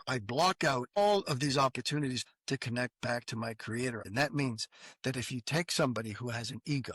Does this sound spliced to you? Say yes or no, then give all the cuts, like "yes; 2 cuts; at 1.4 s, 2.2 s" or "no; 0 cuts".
yes; 3 cuts; at 1.0 s, 2.3 s, 4.1 s